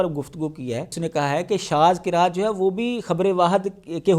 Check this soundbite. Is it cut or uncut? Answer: cut